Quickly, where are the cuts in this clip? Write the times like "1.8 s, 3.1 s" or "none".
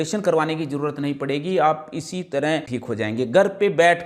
2.7 s

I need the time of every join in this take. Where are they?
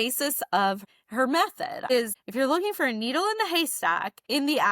0.9 s, 1.9 s

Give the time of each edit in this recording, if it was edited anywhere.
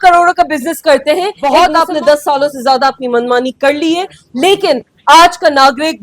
1.4 s

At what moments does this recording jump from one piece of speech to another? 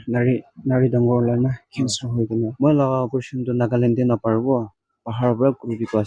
2.5 s

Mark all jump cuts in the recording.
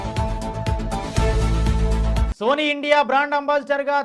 2.3 s

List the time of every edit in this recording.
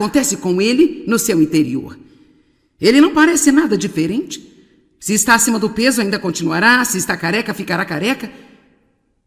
4.1 s

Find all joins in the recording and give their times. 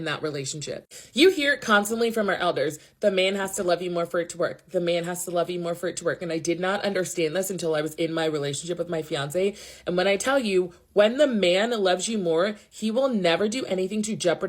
2.6 s, 12.3 s

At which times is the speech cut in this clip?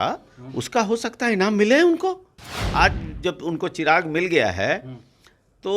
2.6 s

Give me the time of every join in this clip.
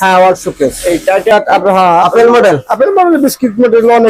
1.3 s

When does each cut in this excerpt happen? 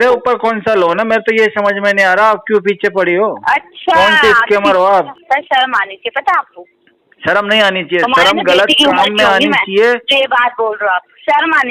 5.2 s

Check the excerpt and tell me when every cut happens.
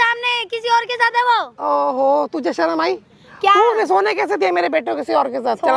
none

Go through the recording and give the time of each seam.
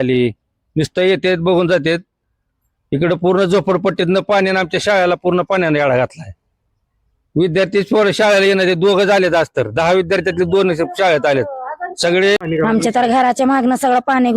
12.4 s

